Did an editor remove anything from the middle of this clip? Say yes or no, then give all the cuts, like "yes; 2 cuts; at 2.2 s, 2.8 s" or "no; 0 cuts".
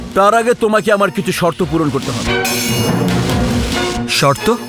no; 0 cuts